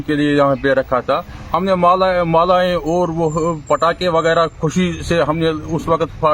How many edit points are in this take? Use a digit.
0